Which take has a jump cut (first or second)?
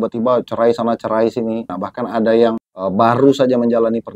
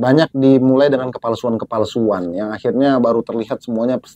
first